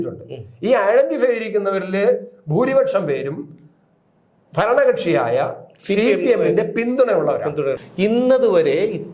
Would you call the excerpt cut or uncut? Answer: cut